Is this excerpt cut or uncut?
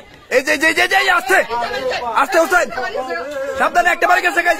uncut